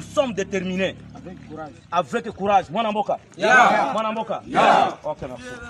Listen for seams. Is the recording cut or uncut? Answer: uncut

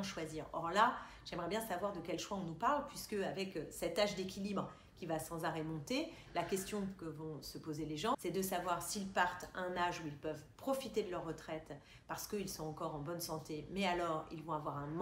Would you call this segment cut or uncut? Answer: uncut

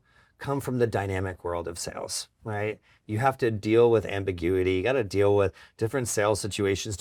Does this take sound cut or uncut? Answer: uncut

